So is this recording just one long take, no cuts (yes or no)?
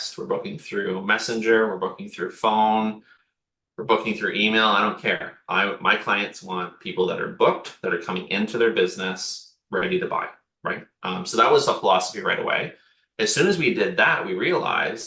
yes